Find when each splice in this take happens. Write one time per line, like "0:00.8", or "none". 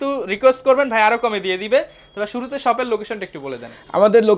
none